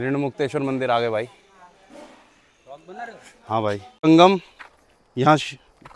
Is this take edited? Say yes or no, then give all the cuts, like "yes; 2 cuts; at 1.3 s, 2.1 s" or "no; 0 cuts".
yes; 1 cut; at 3.9 s